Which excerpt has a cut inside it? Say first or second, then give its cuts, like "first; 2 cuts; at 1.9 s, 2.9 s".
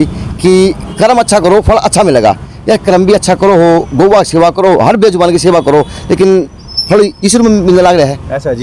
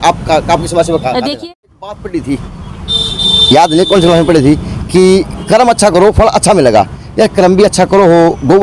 second; 1 cut; at 1.3 s